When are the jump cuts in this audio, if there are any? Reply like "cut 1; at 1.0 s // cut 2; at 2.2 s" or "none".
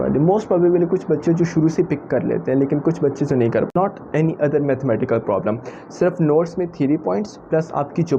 cut 1; at 3.7 s